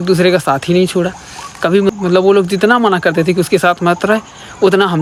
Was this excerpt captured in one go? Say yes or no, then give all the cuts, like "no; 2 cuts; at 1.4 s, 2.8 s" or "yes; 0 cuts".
yes; 0 cuts